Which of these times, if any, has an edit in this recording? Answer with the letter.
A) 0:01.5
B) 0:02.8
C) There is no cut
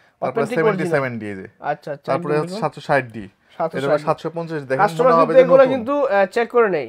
C